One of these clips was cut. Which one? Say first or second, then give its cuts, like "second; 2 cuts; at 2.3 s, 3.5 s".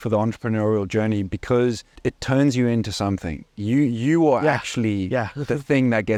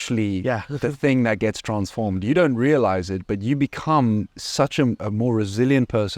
second; 1 cut; at 5.0 s